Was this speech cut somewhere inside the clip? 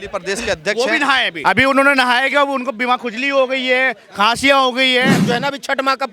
yes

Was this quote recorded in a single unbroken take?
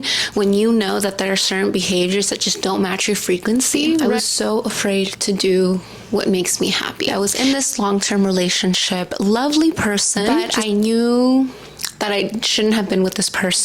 no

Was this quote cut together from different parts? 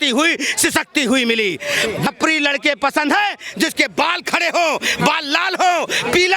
yes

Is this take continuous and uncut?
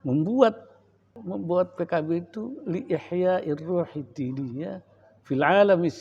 no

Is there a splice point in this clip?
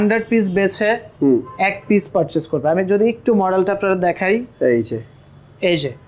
no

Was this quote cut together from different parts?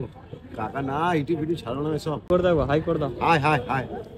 yes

